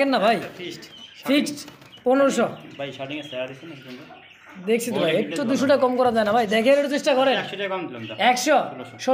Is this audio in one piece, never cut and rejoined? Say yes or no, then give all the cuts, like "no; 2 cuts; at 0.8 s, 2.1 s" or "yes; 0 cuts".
yes; 0 cuts